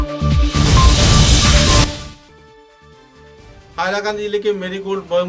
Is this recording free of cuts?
yes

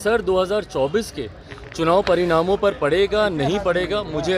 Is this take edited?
no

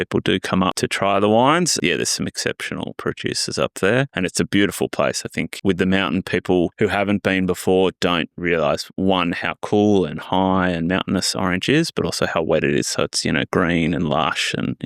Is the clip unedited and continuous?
no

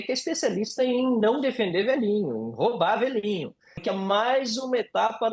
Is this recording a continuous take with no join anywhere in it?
no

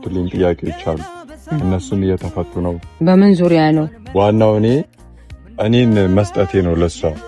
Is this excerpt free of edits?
no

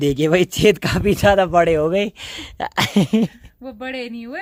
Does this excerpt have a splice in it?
no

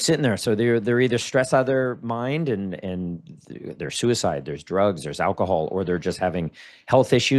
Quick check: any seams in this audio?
no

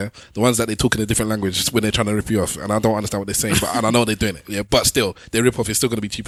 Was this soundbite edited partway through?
no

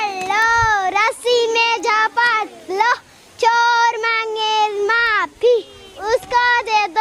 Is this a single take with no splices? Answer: yes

